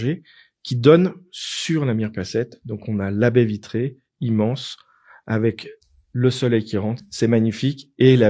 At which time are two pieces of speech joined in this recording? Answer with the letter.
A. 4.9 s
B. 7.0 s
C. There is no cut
B